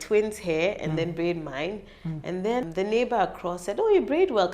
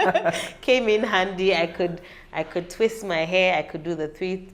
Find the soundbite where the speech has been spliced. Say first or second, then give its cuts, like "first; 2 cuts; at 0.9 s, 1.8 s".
first; 1 cut; at 2.6 s